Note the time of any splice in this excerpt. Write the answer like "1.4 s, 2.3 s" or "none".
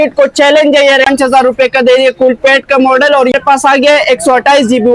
1.1 s, 3.3 s